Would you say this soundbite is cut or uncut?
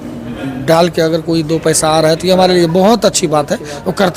uncut